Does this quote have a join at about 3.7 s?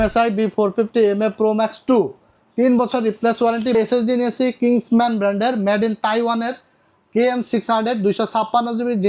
yes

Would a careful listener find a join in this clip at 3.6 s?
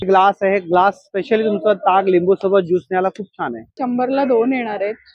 yes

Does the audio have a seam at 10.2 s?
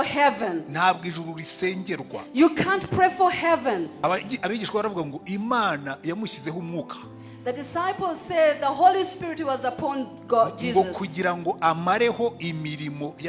no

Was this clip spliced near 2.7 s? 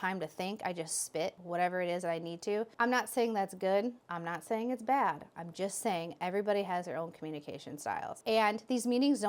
no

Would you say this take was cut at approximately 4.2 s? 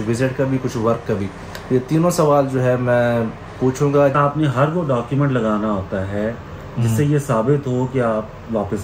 yes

